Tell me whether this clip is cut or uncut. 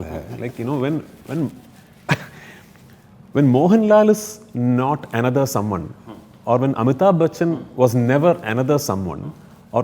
uncut